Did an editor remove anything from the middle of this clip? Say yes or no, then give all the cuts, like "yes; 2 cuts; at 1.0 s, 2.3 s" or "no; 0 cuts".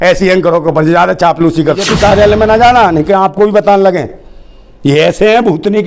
yes; 1 cut; at 1.8 s